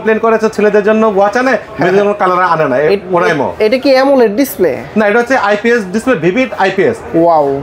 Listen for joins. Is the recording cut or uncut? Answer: uncut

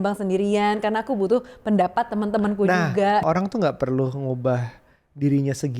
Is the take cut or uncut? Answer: cut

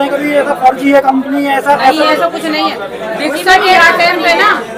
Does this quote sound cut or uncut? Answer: uncut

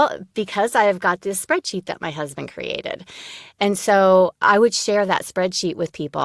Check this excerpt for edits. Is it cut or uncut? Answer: uncut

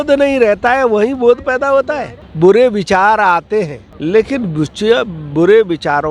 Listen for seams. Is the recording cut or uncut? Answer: cut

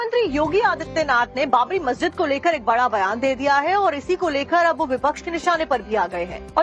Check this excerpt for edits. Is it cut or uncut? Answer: cut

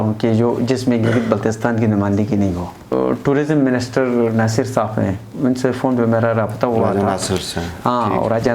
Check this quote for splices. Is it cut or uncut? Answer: cut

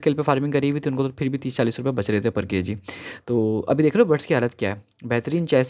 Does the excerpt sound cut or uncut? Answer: uncut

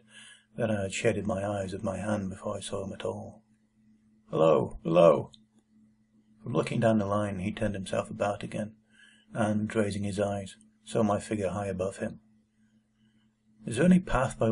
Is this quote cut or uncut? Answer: cut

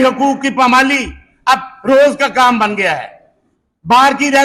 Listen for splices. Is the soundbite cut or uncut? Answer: uncut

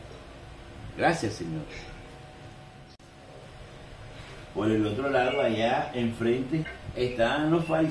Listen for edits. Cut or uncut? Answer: cut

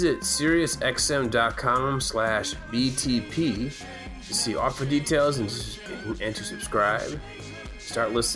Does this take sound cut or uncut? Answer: uncut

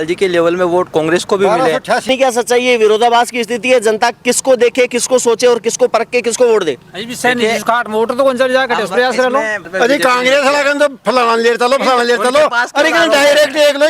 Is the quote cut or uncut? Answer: cut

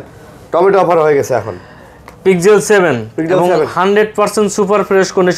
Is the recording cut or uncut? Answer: uncut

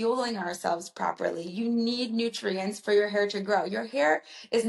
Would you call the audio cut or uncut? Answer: uncut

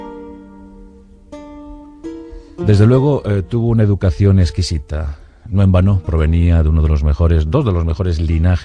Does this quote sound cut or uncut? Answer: cut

